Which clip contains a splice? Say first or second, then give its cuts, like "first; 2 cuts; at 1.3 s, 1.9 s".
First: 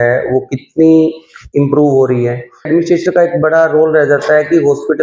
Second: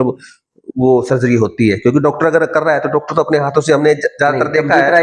first; 1 cut; at 2.7 s